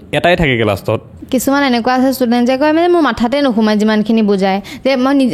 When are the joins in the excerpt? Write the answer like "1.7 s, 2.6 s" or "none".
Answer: 1.1 s